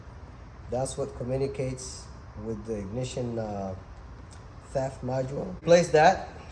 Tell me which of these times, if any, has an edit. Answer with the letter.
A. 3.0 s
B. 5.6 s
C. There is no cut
B